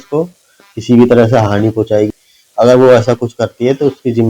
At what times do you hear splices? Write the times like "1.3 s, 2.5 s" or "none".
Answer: 2.1 s